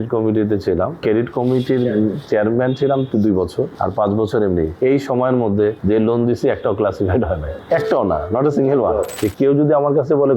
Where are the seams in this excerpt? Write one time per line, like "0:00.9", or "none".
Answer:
0:01.0
0:03.7
0:04.7
0:05.8
0:07.5
0:09.1